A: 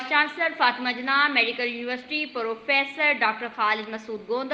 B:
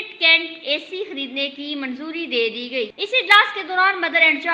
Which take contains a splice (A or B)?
B